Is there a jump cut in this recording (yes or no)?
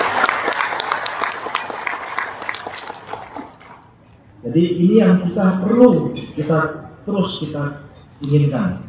no